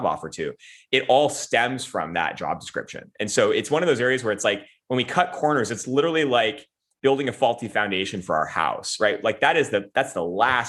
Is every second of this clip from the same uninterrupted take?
yes; 0 cuts

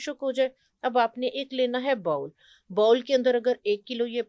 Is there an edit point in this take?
no; 0 cuts

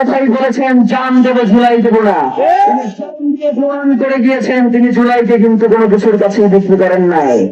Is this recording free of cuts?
yes; 0 cuts

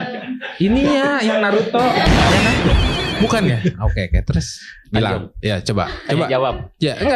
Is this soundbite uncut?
no; 1 cut; at 4.7 s

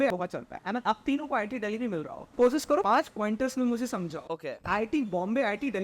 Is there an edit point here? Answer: no; 0 cuts

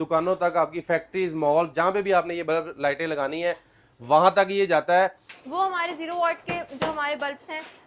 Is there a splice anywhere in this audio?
yes; 1 cut; at 5.3 s

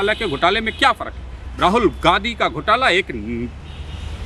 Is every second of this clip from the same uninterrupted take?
yes; 0 cuts

